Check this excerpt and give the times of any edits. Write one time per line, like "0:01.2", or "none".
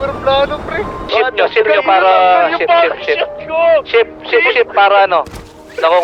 0:01.0